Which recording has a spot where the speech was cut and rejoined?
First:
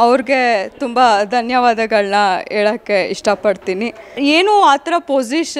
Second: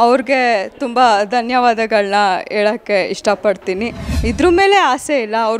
second; 1 cut; at 4.0 s

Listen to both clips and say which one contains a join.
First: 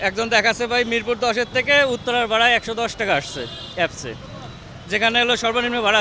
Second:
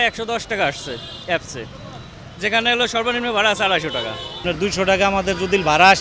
second; 1 cut; at 4.4 s

